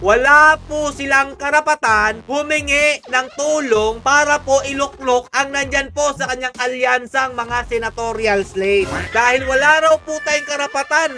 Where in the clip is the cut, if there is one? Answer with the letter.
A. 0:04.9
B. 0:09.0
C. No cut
B